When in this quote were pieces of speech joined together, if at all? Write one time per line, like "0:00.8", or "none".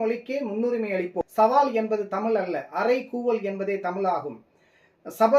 0:01.1